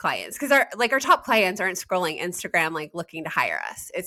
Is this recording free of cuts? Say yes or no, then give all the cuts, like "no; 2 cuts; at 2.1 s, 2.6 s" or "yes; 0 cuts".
yes; 0 cuts